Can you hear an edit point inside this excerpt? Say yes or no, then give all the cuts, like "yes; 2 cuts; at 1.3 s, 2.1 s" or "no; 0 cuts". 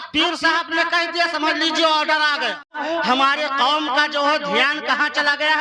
yes; 1 cut; at 2.8 s